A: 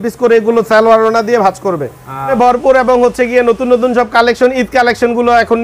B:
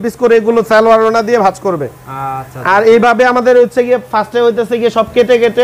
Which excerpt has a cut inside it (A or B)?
A